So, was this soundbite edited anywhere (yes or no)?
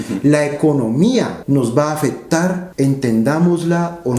yes